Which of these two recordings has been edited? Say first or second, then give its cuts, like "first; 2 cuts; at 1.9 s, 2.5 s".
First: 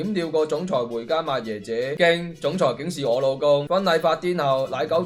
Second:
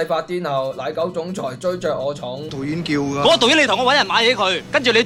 first; 1 cut; at 2.0 s